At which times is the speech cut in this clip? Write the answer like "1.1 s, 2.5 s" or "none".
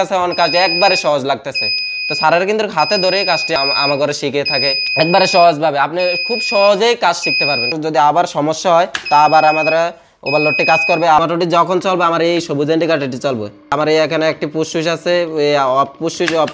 3.6 s, 4.8 s, 7.7 s, 11.2 s, 13.7 s